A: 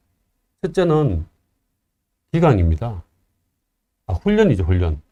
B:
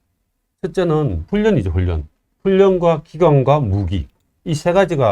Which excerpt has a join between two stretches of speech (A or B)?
B